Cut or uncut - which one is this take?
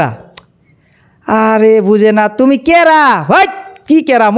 uncut